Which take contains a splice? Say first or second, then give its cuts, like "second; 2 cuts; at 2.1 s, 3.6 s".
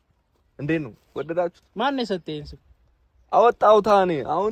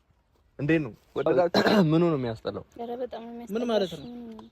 second; 1 cut; at 1.5 s